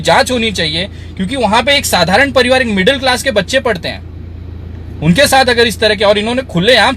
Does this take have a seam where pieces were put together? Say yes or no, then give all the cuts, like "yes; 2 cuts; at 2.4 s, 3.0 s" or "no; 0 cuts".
no; 0 cuts